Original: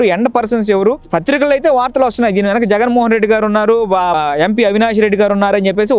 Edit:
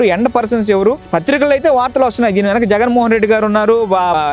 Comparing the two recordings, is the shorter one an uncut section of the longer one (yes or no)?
yes